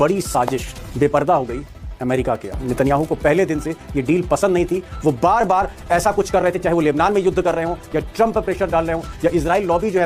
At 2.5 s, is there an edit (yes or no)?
yes